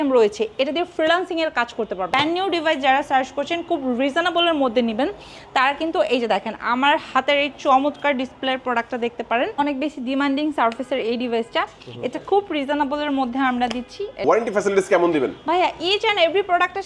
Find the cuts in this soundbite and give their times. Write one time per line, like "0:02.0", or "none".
0:02.1
0:09.6
0:14.2